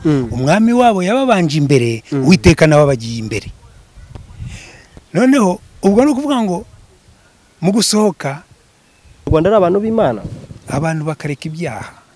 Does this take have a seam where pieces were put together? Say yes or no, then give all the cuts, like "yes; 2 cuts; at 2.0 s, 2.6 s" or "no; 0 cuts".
yes; 1 cut; at 9.3 s